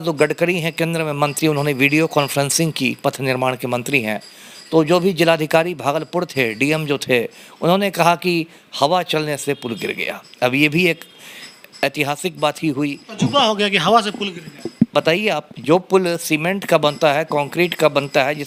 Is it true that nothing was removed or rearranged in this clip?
yes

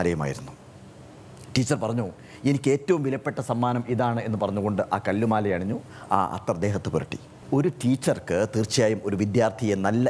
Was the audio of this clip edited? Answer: yes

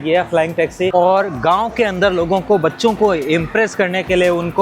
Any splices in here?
yes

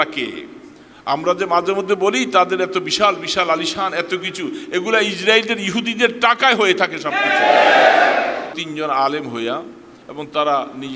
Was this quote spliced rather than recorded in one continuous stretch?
yes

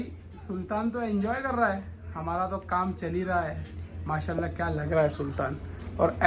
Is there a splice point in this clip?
no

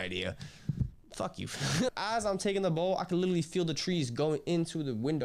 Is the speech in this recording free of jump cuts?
no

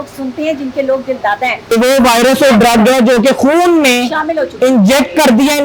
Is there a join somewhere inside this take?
yes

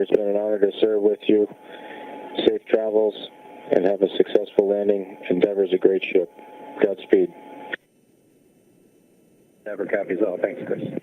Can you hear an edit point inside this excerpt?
yes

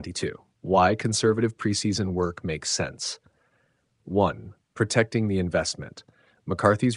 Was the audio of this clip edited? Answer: no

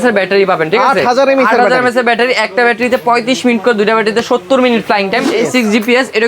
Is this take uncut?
no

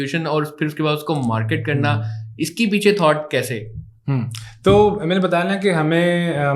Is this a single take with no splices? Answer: yes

